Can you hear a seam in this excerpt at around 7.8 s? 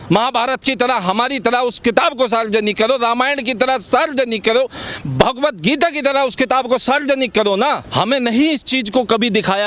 yes; 1 cut; at 7.8 s

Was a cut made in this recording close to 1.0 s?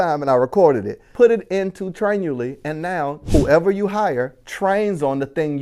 yes; 2 cuts; at 1.0 s, 3.2 s

